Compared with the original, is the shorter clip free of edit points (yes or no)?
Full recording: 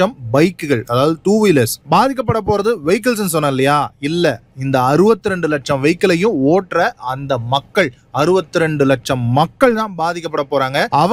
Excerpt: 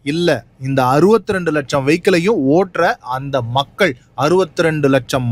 yes